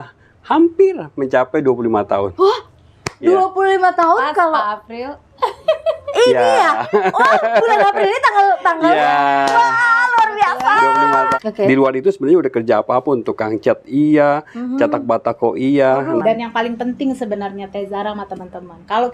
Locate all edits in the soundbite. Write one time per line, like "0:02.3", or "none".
0:11.3
0:16.2